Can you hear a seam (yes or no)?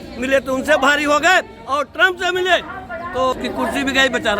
yes